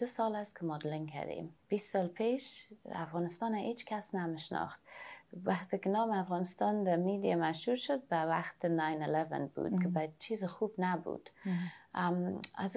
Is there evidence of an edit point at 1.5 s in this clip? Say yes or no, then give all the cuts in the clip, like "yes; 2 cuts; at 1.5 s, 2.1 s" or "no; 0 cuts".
yes; 1 cut; at 1.5 s